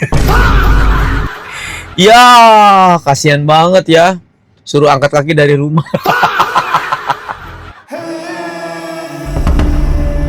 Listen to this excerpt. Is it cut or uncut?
uncut